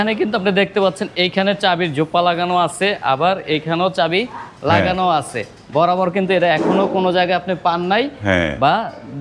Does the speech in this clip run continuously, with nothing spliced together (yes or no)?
yes